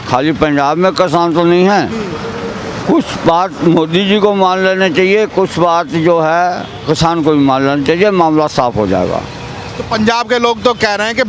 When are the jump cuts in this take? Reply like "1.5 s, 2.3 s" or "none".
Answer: none